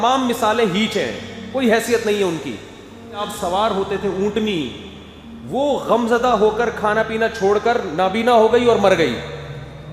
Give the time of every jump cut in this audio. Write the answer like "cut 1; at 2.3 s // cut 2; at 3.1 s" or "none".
cut 1; at 3.2 s